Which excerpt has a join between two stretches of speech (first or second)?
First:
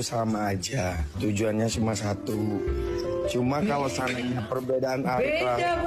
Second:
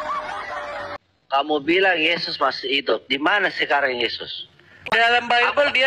second